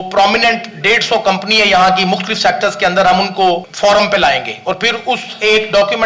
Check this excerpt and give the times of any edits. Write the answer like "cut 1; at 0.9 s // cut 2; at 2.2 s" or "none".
cut 1; at 3.7 s